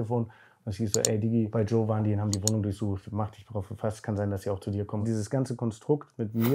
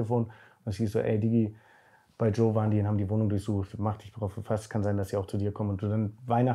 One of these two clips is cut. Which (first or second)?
first